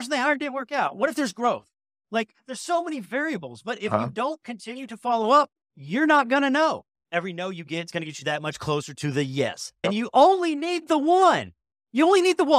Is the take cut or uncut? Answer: cut